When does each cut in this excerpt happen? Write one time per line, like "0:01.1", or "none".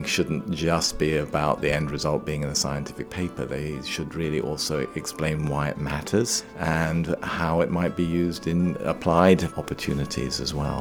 0:06.4
0:08.8
0:09.5